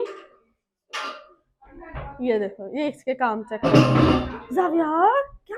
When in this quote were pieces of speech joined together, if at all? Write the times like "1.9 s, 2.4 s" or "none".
none